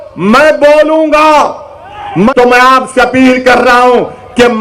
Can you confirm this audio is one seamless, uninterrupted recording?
no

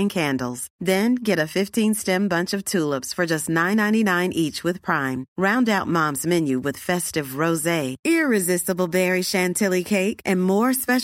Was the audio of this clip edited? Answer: no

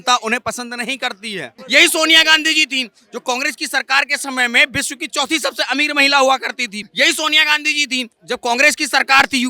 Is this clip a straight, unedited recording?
no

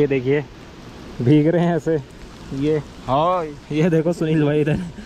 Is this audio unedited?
yes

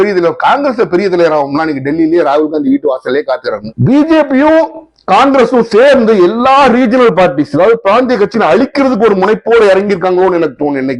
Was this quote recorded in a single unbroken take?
no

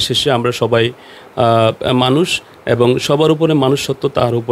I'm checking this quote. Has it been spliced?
no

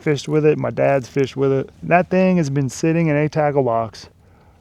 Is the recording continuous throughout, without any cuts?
yes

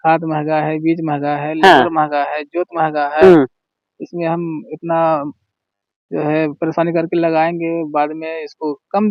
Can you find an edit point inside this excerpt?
no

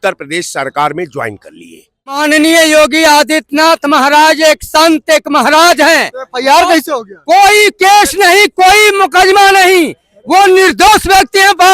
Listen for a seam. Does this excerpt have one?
yes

